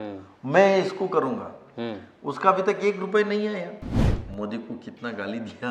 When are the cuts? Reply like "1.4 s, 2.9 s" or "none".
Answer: 4.1 s